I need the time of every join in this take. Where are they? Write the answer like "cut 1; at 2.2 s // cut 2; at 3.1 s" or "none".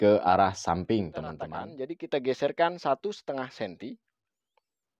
cut 1; at 1.5 s